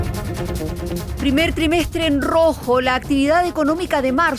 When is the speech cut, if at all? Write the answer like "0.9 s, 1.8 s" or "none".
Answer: 1.1 s